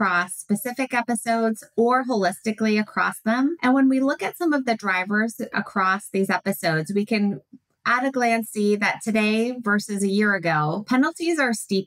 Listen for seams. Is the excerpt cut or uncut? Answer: cut